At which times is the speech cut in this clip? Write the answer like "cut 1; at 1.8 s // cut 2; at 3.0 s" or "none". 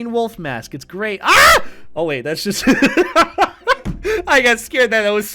none